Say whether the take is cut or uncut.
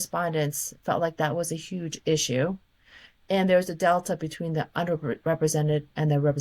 uncut